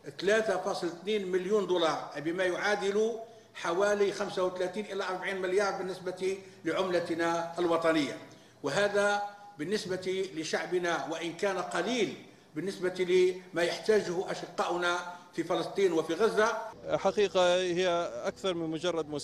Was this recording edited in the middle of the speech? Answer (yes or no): yes